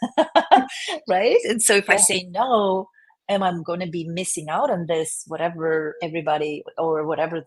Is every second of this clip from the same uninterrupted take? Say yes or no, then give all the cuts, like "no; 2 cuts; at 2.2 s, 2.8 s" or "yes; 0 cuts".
yes; 0 cuts